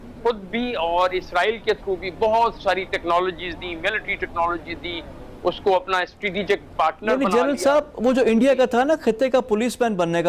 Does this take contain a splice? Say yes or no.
no